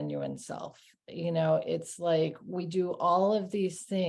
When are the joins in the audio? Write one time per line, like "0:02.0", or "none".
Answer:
none